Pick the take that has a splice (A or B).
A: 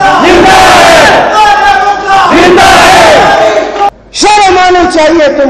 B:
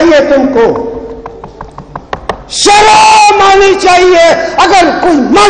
A